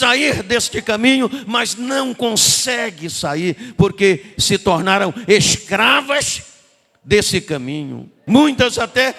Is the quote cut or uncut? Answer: cut